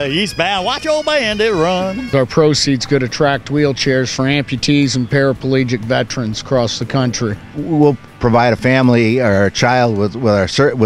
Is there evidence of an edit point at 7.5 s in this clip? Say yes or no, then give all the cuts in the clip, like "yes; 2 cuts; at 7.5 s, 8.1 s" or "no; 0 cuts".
yes; 2 cuts; at 2.1 s, 7.5 s